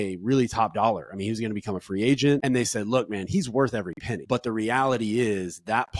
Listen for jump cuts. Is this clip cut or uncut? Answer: cut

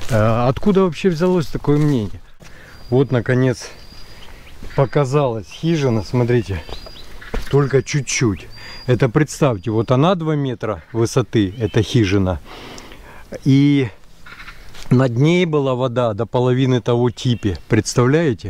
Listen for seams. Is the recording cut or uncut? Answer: cut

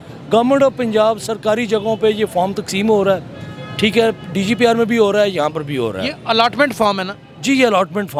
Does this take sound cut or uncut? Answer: uncut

